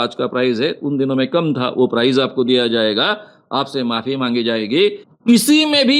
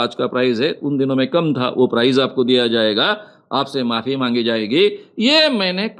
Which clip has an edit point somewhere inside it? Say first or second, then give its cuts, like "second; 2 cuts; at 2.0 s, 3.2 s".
first; 1 cut; at 5.1 s